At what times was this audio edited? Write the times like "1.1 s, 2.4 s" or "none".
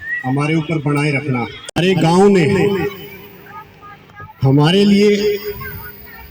1.8 s